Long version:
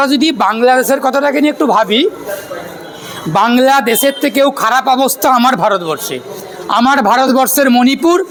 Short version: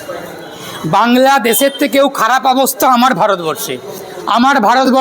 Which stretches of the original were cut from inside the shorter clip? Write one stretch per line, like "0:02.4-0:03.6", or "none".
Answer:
none

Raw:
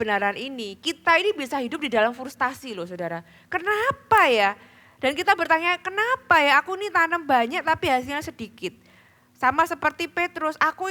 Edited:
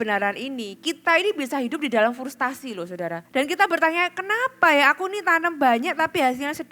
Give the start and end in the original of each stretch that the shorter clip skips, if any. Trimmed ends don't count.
0:03.2-0:04.9

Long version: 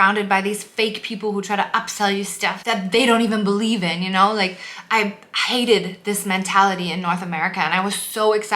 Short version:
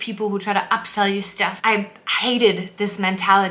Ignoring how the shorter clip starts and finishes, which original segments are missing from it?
0:02.6-0:04.8

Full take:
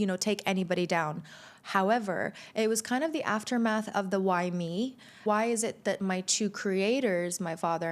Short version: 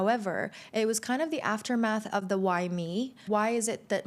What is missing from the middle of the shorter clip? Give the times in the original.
0:05.0-0:05.1

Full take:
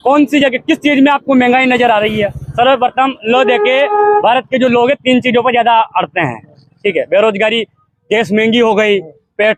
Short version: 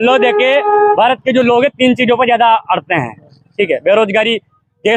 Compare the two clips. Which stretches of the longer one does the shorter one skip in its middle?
none

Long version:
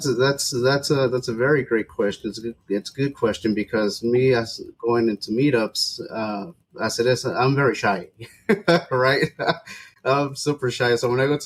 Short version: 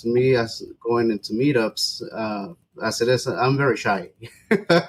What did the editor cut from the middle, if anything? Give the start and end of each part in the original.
none

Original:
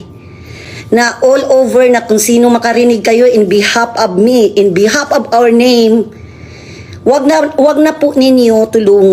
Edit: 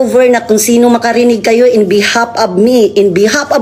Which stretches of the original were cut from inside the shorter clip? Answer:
none

